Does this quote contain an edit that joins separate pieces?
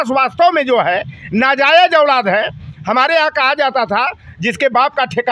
no; 0 cuts

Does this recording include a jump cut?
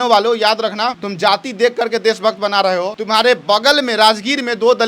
yes; 2 cuts; at 1.0 s, 3.0 s

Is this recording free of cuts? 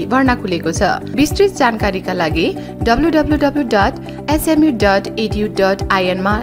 no; 1 cut; at 1.1 s

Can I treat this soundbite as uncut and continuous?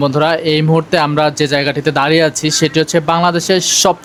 yes; 0 cuts

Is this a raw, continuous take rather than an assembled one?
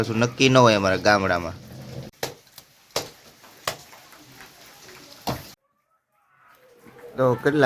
no; 2 cuts; at 2.1 s, 5.6 s

